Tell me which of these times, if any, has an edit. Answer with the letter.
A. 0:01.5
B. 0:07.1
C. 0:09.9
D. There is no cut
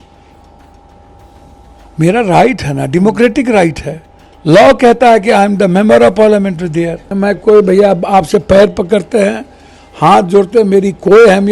B